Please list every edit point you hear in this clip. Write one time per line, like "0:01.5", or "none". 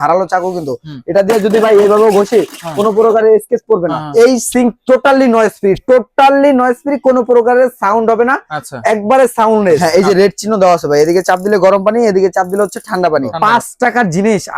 0:04.0
0:09.8
0:13.3